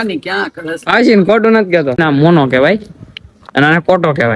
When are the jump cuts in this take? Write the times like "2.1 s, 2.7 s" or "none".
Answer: 1.9 s